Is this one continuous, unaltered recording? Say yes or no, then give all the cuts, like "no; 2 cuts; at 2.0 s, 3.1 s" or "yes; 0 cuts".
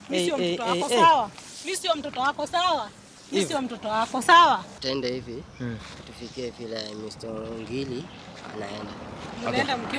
no; 1 cut; at 4.7 s